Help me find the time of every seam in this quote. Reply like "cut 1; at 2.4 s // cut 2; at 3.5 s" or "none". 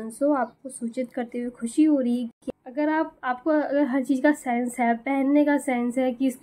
cut 1; at 2.4 s